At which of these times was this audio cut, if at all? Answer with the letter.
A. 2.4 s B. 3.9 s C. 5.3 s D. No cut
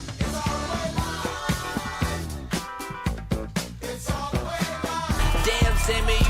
C